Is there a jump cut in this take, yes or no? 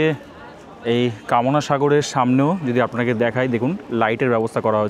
no